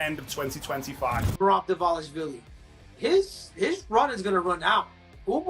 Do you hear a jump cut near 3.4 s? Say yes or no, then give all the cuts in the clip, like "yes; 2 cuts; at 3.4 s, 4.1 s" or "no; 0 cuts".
no; 1 cut; at 1.3 s